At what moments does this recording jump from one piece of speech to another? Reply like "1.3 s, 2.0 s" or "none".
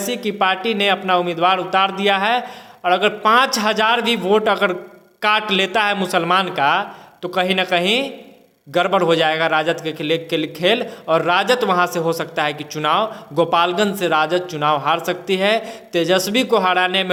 none